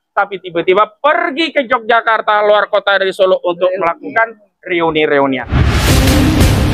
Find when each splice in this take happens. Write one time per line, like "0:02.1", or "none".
0:05.4